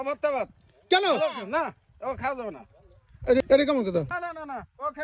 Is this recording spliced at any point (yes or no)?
yes